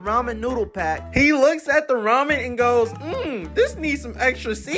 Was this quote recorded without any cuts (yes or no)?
no